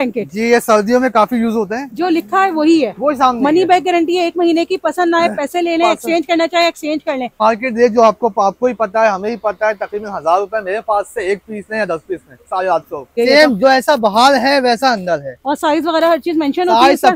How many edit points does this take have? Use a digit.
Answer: 3